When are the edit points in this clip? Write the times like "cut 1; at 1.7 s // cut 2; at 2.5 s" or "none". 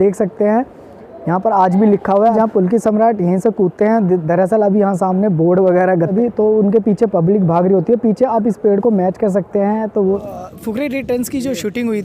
cut 1; at 2.3 s // cut 2; at 6.1 s // cut 3; at 10.2 s

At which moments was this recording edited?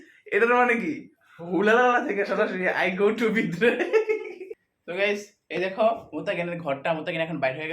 cut 1; at 4.4 s

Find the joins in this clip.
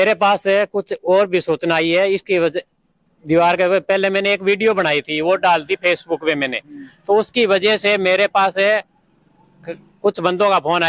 none

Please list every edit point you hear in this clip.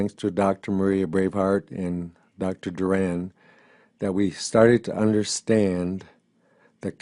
cut 1; at 2.6 s

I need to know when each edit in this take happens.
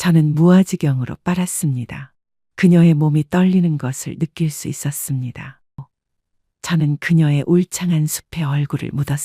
cut 1; at 5.9 s

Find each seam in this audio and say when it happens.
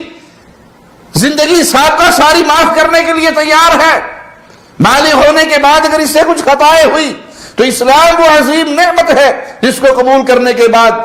none

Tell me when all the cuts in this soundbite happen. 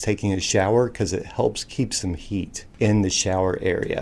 cut 1; at 2.6 s

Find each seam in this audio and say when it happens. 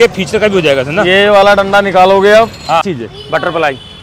cut 1; at 3.0 s

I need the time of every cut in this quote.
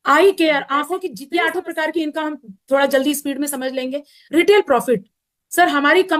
cut 1; at 1.2 s

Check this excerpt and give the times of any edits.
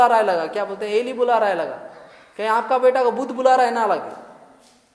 none

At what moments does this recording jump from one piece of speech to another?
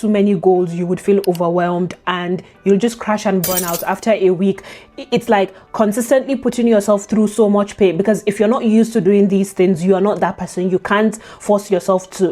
none

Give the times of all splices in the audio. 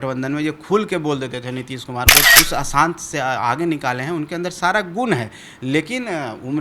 cut 1; at 2.3 s

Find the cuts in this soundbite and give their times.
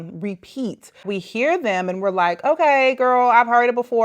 cut 1; at 1.0 s

